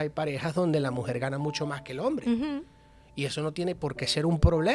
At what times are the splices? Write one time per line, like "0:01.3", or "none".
none